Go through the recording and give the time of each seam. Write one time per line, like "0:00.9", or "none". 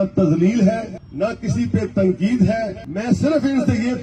0:01.0
0:02.8